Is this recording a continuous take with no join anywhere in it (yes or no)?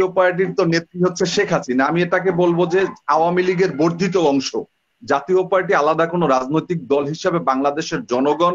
yes